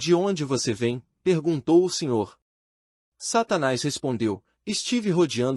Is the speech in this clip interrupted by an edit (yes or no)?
no